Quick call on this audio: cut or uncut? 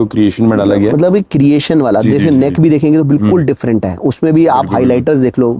uncut